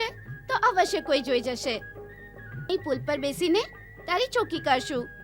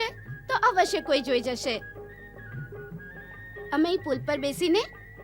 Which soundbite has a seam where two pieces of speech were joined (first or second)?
first